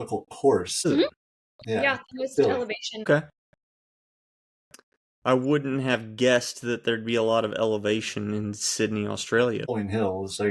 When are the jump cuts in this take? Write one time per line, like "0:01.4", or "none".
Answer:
0:00.9
0:03.0
0:09.7